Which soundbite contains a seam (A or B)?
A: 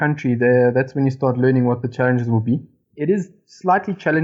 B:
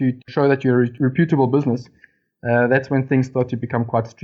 A